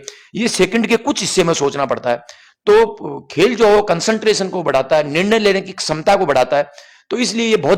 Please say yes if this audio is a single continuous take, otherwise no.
yes